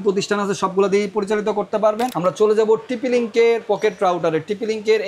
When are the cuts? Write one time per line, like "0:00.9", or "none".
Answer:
0:02.1

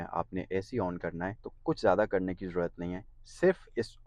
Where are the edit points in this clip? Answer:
0:01.5

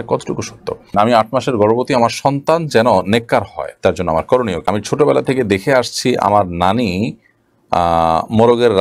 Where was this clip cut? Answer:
0:00.9
0:04.6

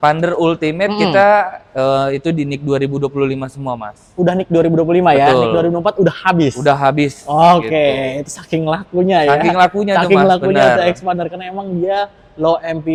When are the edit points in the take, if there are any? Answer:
none

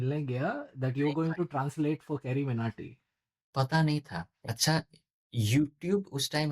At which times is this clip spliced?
0:04.3

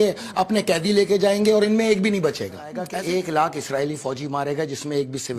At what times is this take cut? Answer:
0:02.8

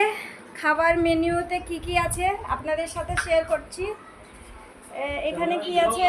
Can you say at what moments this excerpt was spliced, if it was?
none

